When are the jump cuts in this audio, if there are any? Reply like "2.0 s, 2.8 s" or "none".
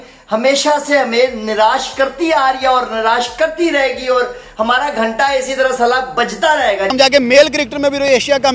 6.9 s